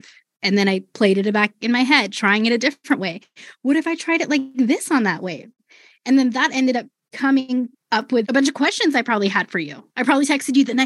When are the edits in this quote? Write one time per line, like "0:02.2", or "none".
0:08.2